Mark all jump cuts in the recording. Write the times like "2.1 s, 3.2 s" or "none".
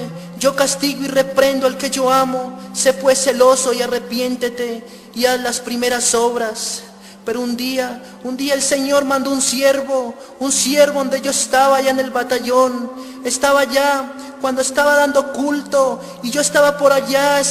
3.6 s